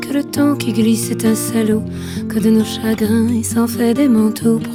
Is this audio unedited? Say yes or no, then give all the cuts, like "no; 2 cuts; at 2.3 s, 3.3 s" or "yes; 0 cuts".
yes; 0 cuts